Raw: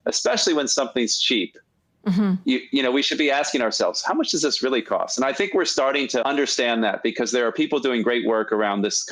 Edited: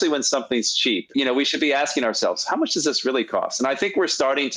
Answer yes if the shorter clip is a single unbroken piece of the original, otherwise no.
no